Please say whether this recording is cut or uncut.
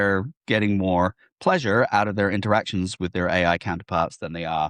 uncut